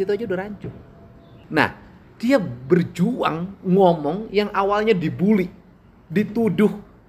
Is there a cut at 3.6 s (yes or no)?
no